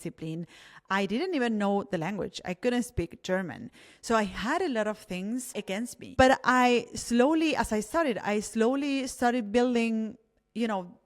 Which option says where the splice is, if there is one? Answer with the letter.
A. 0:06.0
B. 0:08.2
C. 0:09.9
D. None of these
A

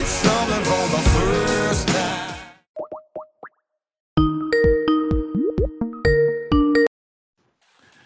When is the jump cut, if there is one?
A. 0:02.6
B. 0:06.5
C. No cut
A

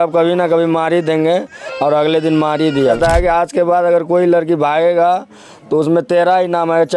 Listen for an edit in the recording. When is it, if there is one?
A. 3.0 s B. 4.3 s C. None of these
A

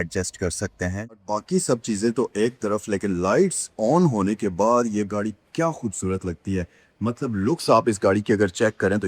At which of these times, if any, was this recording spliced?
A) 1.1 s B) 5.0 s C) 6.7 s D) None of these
A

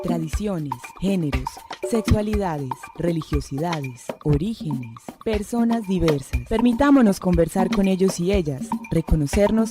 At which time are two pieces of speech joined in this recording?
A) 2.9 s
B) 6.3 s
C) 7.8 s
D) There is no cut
B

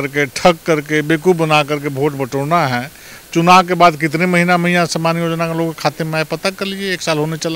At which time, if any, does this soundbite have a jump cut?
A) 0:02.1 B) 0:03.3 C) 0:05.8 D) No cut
D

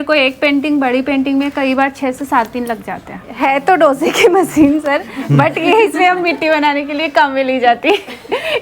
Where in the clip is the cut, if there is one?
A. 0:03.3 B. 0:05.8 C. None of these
A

